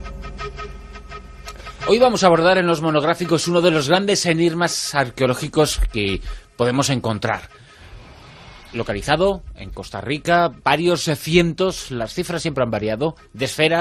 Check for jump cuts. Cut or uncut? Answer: uncut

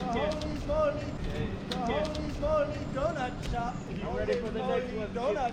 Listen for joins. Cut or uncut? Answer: uncut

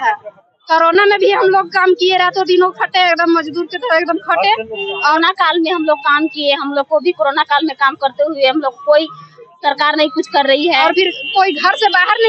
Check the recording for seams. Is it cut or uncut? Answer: cut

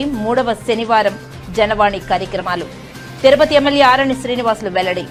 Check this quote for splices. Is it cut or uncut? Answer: uncut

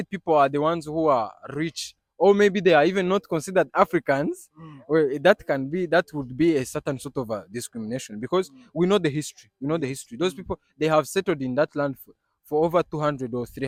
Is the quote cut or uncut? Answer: uncut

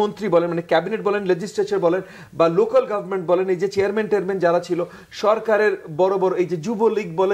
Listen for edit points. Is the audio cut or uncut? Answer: uncut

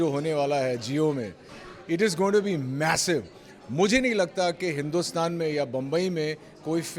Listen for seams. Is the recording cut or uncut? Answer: uncut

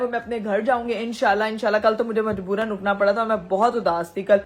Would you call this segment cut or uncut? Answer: uncut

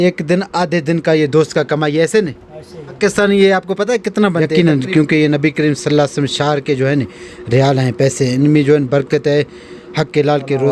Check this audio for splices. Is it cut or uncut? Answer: cut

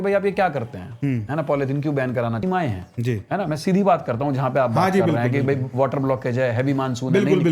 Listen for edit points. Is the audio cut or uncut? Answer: cut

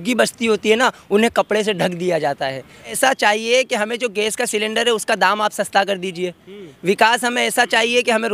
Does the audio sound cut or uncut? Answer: cut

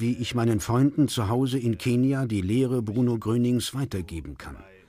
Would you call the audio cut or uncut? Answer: cut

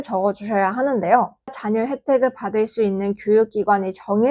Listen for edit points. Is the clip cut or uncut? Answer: cut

